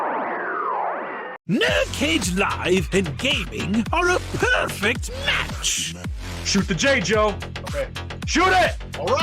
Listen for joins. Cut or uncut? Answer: cut